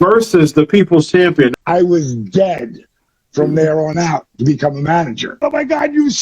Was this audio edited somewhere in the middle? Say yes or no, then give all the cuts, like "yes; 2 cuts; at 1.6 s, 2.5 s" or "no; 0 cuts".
yes; 2 cuts; at 1.5 s, 5.4 s